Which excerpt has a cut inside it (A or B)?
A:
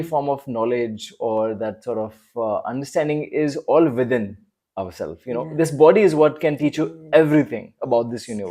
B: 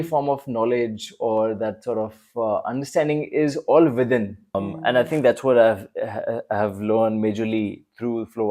B